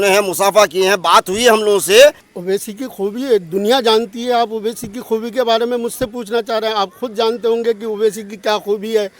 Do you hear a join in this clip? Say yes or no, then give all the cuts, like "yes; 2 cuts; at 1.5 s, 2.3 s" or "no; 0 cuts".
yes; 1 cut; at 2.3 s